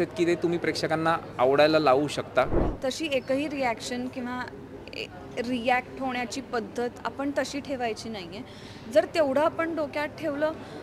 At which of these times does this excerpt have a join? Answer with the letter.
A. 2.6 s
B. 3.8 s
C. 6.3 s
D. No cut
A